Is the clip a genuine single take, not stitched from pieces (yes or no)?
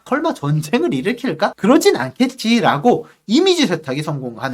yes